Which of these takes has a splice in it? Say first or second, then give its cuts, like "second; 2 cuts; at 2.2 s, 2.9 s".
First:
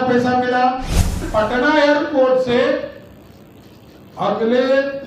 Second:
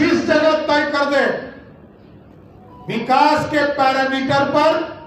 first; 1 cut; at 1.3 s